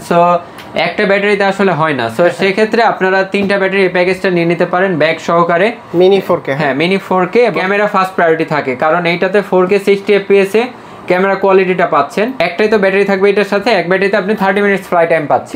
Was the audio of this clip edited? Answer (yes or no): yes